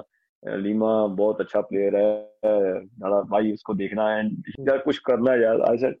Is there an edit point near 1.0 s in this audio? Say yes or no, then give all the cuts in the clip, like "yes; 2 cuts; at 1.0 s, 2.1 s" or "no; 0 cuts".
no; 1 cut; at 4.4 s